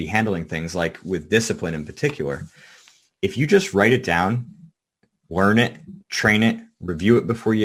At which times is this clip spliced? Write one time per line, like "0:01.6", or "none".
none

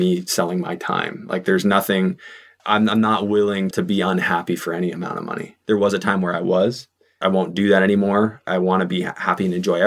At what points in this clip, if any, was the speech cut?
0:03.7
0:05.5
0:07.1

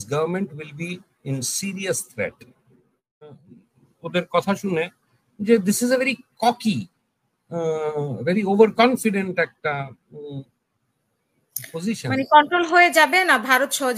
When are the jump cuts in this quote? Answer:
0:03.5

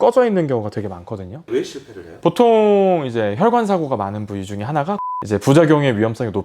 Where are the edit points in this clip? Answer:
0:01.4
0:05.1

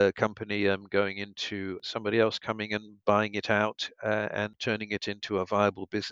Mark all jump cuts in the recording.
0:01.8
0:04.6

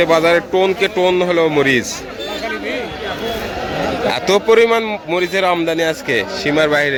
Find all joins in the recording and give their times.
none

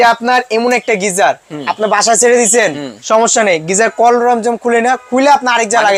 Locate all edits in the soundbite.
none

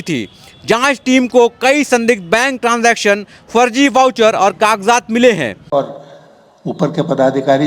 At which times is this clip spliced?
0:05.7

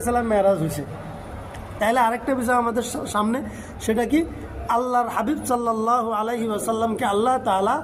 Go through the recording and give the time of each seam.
none

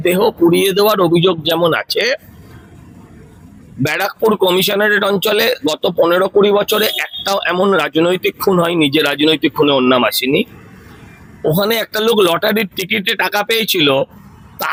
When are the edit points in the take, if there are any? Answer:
none

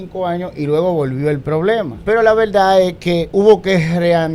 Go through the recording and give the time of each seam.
0:01.9
0:03.2

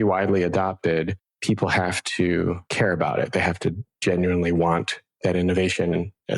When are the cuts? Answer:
0:01.2
0:02.6

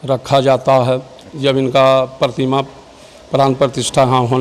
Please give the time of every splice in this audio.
none

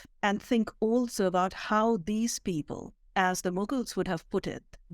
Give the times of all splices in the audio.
none

